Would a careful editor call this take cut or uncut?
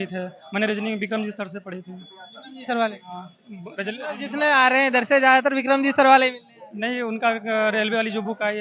uncut